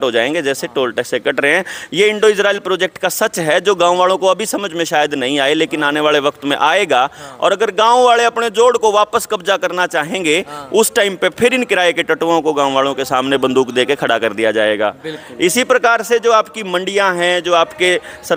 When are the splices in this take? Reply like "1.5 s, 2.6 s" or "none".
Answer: none